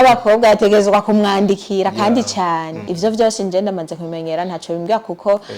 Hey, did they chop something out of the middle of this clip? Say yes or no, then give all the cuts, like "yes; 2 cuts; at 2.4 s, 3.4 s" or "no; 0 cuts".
yes; 1 cut; at 2.8 s